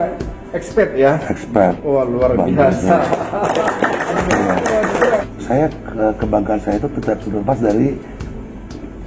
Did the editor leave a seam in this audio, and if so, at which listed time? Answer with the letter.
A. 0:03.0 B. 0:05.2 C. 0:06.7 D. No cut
B